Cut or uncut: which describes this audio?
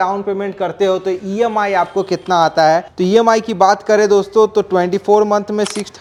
uncut